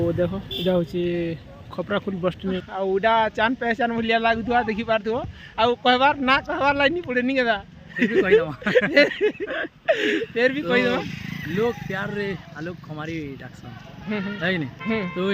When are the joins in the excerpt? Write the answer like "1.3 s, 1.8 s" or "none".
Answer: 2.7 s